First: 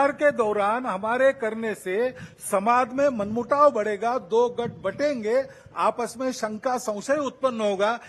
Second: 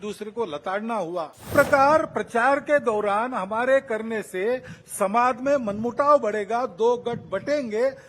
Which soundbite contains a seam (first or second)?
second